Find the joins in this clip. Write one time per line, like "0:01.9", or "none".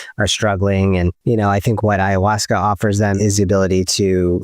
0:01.2
0:03.1